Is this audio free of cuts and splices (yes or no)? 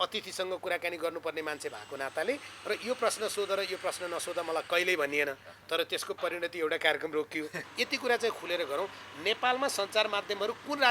no